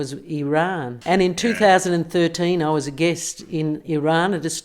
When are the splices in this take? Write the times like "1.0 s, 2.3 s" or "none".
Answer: 0.9 s